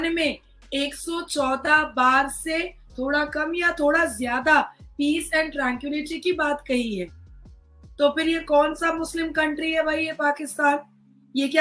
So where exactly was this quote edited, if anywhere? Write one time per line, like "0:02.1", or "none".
none